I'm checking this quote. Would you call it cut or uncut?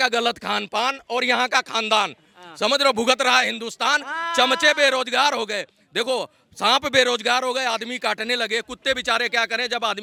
uncut